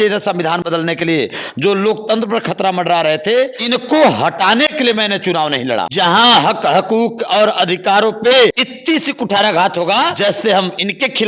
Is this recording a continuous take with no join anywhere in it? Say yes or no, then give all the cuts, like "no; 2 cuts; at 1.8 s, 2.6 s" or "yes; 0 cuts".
no; 4 cuts; at 3.6 s, 5.9 s, 8.7 s, 10.1 s